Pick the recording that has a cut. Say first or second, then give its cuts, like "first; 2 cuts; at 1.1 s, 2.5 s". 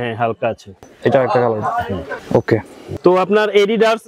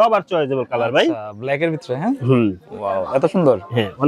first; 3 cuts; at 0.9 s, 2.2 s, 2.8 s